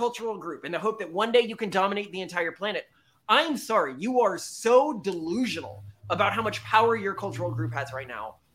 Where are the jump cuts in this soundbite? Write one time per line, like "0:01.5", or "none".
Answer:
none